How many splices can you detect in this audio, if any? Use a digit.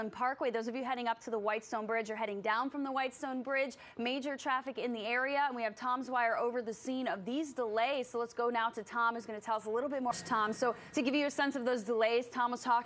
1